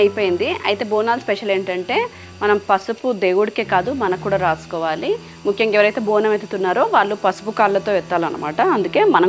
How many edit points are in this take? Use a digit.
0